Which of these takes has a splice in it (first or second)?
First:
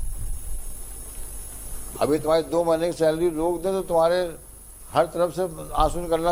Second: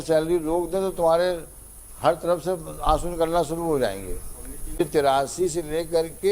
second